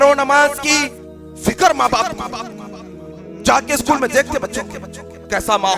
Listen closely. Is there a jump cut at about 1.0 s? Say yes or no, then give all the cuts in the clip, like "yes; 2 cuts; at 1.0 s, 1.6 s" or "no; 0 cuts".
yes; 1 cut; at 1.0 s